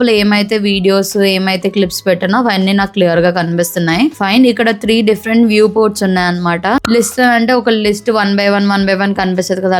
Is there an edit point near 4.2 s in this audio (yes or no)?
no